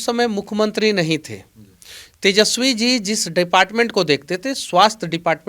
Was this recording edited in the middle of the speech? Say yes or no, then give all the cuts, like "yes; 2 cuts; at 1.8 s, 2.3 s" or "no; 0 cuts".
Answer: no; 0 cuts